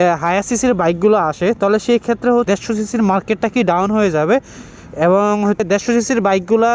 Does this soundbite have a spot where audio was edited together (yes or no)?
yes